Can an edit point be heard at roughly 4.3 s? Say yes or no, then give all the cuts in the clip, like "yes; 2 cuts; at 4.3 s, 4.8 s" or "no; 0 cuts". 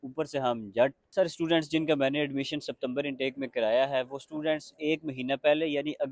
no; 1 cut; at 1.0 s